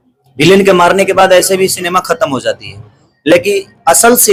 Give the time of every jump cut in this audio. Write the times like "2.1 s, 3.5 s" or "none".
none